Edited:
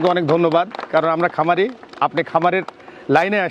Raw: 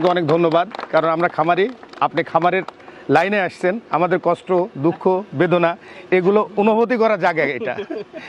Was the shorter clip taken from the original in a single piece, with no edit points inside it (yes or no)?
yes